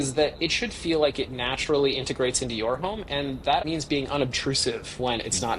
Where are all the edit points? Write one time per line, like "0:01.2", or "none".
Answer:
0:03.6

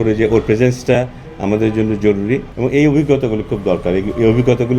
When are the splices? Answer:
0:02.5

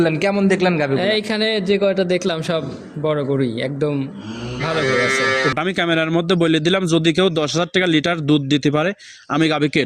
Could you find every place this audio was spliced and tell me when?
0:05.5

